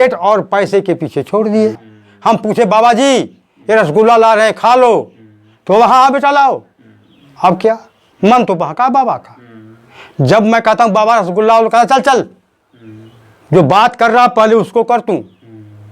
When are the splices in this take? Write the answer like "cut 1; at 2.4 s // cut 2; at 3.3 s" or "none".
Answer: cut 1; at 1.9 s